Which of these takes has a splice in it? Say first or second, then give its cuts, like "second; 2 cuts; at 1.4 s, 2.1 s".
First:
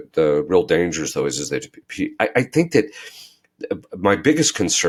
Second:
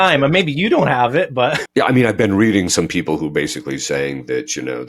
second; 1 cut; at 1.6 s